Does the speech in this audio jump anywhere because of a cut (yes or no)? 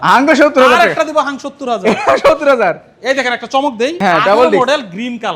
no